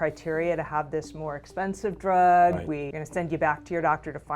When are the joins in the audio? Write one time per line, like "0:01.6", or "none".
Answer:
0:02.9